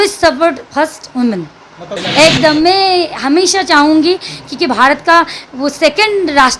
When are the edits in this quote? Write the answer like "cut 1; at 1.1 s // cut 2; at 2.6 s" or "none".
cut 1; at 1.9 s